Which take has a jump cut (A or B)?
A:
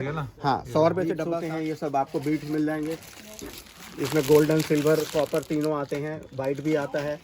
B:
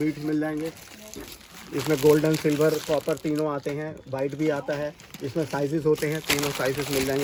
A